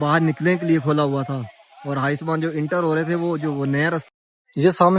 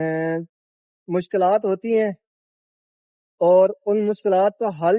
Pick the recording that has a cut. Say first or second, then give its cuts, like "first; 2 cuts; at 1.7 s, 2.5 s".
first; 1 cut; at 4.0 s